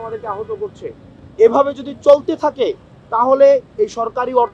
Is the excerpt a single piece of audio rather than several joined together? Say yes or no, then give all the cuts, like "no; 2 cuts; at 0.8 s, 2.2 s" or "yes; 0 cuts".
yes; 0 cuts